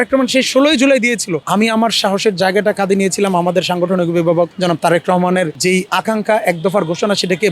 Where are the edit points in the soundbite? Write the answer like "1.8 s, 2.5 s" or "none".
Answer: 1.3 s